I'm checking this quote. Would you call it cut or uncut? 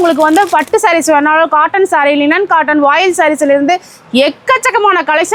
uncut